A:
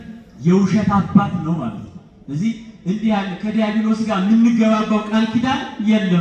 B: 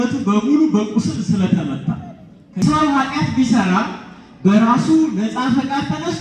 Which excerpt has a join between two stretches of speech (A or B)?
B